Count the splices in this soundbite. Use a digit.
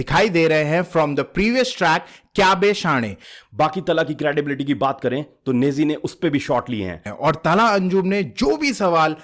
2